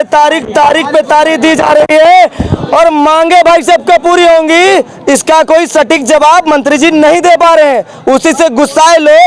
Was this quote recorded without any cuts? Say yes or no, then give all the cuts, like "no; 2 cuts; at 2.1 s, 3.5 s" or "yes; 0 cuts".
yes; 0 cuts